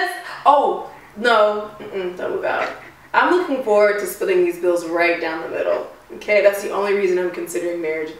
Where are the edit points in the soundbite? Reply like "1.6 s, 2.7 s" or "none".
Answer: none